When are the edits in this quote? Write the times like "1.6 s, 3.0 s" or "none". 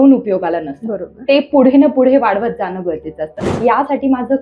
3.5 s